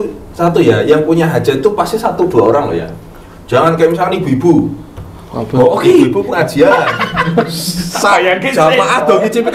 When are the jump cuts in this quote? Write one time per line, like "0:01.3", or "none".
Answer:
none